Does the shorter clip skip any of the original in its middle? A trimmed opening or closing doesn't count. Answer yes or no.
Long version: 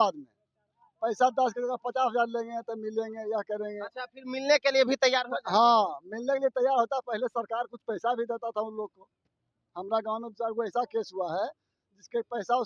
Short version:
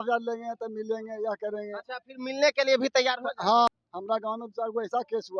yes